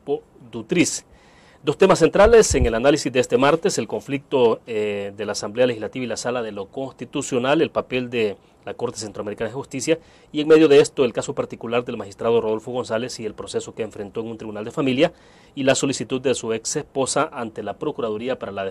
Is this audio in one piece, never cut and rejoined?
yes; 0 cuts

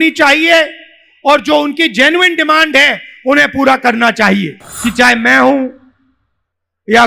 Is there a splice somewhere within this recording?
yes; 1 cut; at 4.6 s

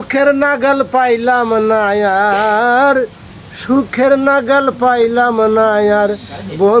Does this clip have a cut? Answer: no; 0 cuts

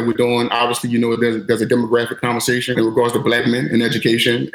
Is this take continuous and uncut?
no; 1 cut; at 2.7 s

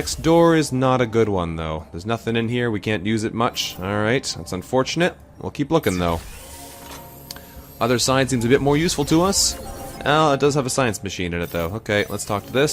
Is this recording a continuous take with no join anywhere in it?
no; 1 cut; at 8.2 s

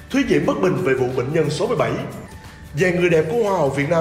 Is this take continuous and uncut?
no; 1 cut; at 2.4 s

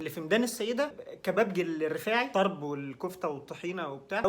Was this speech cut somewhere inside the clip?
yes; 1 cut; at 2.3 s

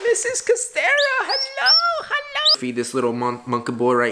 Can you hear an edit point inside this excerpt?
yes; 1 cut; at 2.6 s

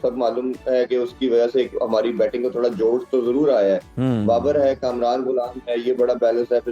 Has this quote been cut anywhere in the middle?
no; 0 cuts

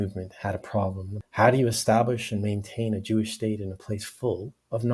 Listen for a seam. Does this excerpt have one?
yes; 1 cut; at 1.1 s

